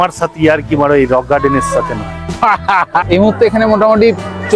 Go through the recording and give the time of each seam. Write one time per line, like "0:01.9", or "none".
0:03.0